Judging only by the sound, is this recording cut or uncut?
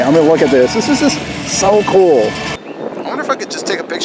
cut